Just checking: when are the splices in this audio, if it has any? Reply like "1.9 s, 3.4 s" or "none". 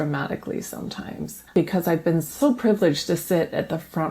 1.5 s